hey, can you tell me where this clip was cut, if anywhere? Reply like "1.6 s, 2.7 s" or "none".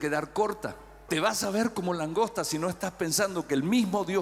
1.0 s